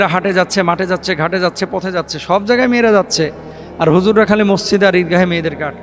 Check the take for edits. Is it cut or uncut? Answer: uncut